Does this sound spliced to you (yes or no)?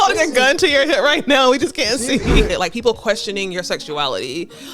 yes